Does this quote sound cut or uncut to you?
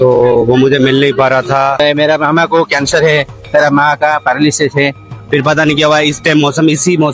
cut